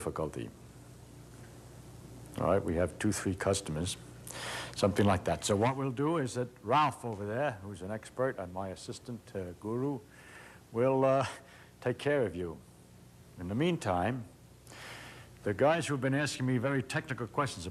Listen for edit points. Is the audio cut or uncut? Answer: uncut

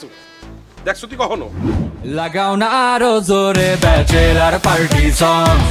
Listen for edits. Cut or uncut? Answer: cut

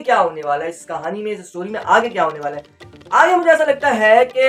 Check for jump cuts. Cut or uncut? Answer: uncut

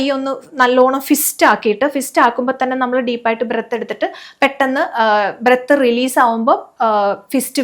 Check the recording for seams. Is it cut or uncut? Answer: uncut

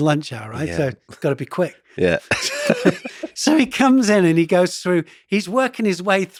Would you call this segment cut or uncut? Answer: uncut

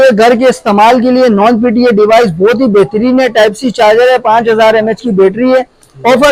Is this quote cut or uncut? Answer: uncut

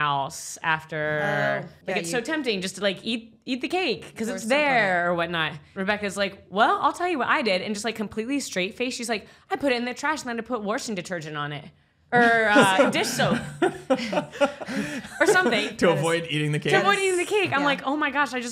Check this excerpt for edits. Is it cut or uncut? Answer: cut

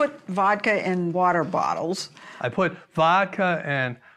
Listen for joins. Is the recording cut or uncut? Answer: cut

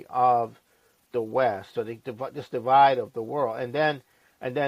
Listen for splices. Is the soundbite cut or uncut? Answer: uncut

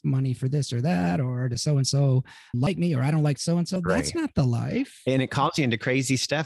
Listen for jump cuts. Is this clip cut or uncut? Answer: cut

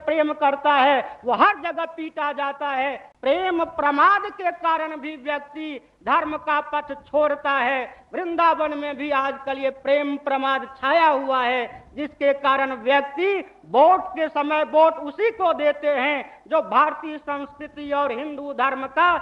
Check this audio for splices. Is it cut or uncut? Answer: cut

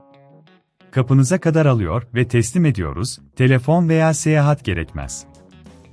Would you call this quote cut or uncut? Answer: cut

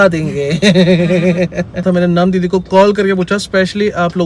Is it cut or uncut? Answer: cut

